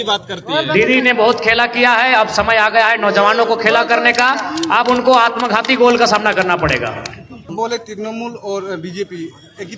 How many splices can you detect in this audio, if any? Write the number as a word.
one